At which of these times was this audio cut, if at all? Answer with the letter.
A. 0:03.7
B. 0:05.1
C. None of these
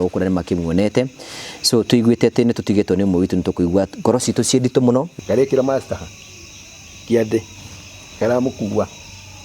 B